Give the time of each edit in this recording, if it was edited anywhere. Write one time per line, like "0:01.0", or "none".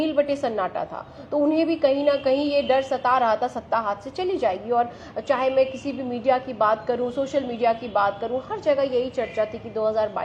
none